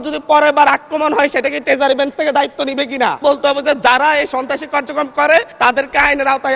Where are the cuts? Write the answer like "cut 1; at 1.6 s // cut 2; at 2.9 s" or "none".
cut 1; at 3.2 s // cut 2; at 5.5 s